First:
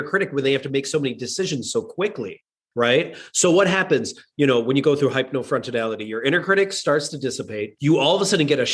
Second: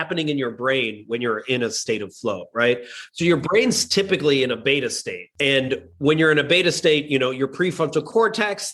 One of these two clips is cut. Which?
first; 1 cut; at 7.6 s

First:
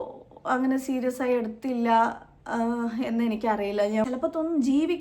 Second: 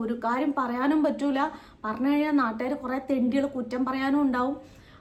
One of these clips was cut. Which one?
first; 1 cut; at 4.0 s

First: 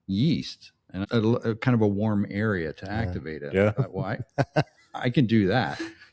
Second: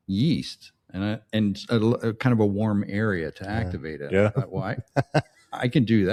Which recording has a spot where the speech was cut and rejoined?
first; 1 cut; at 1.0 s

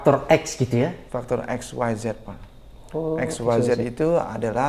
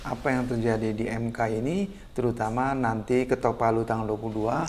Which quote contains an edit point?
first; 1 cut; at 1.0 s

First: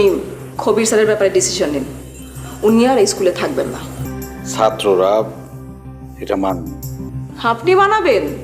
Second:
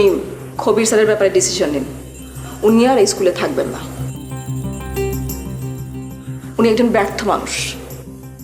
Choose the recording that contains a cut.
first; 2 cuts; at 4.1 s, 7.2 s

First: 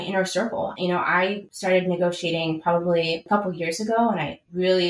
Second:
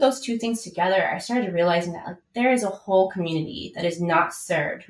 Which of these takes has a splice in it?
first; 2 cuts; at 1.5 s, 3.2 s

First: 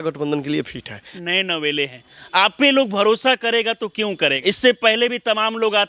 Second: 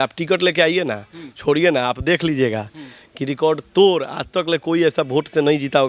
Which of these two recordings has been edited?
first; 2 cuts; at 1.2 s, 4.4 s

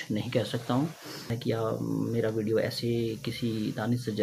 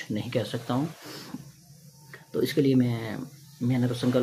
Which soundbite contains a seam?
first; 1 cut; at 1.3 s

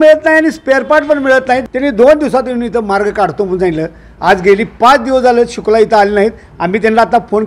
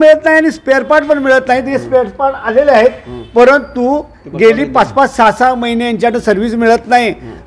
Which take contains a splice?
first; 1 cut; at 1.7 s

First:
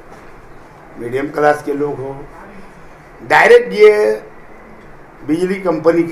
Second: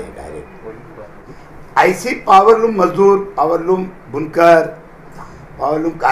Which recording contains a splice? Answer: second; 1 cut; at 1.2 s

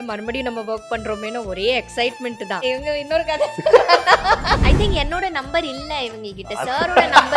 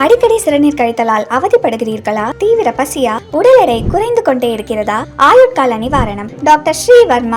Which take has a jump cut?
first; 2 cuts; at 2.6 s, 4.6 s

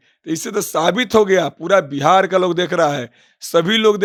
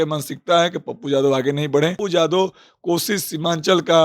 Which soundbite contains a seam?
second; 1 cut; at 2.0 s

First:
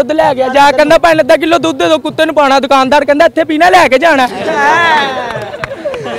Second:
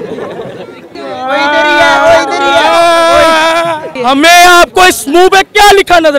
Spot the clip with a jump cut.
second; 2 cuts; at 1.0 s, 3.9 s

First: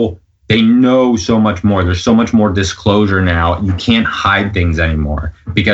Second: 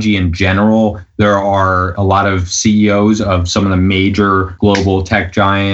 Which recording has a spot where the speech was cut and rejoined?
second; 2 cuts; at 1.9 s, 4.5 s

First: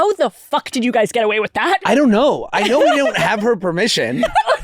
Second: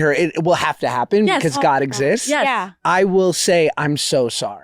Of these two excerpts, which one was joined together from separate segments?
first; 1 cut; at 1.8 s

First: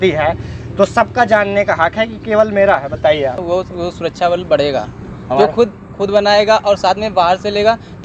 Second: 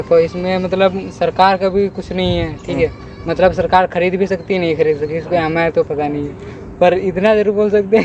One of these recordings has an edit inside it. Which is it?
first; 1 cut; at 3.4 s

